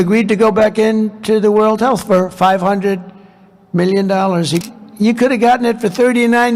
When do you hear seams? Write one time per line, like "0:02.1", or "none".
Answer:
0:04.6